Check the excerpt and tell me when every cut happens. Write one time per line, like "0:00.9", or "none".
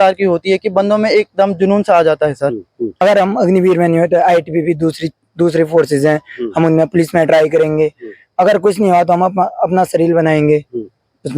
0:02.9